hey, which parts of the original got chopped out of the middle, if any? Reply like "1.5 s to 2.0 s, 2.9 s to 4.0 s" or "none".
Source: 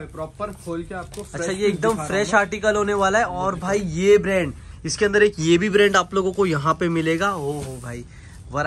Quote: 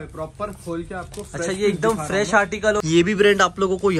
2.8 s to 5.4 s